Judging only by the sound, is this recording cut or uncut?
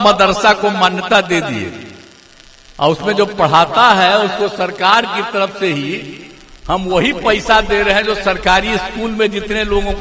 uncut